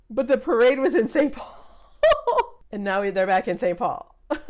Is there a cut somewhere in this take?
yes; 1 cut; at 2.6 s

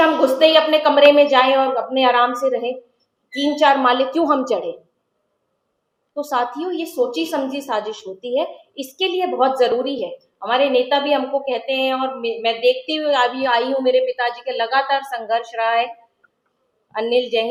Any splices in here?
no; 0 cuts

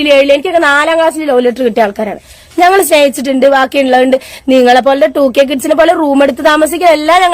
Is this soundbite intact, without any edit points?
yes; 0 cuts

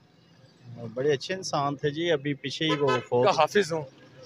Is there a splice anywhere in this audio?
yes; 1 cut; at 3.1 s

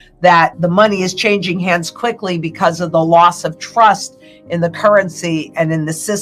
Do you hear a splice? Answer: no; 0 cuts

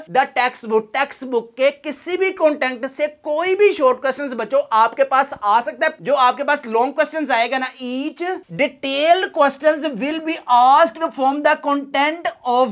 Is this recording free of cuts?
no; 1 cut; at 6.0 s

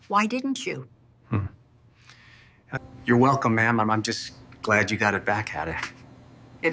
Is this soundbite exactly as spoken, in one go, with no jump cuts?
no; 1 cut; at 2.9 s

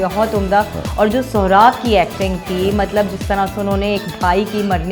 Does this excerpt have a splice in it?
no; 0 cuts

